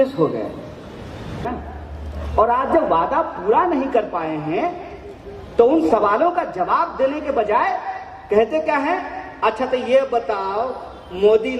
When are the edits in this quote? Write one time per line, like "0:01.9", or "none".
0:01.4